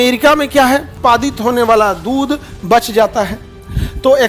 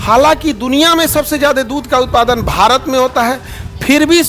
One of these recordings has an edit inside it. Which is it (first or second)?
first